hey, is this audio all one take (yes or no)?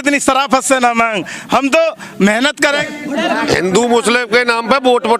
no